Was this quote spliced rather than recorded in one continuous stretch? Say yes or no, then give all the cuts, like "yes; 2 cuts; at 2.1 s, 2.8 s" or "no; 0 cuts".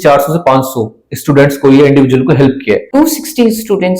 yes; 1 cut; at 2.8 s